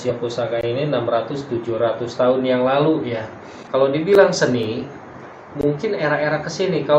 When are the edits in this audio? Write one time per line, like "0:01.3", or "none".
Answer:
0:03.5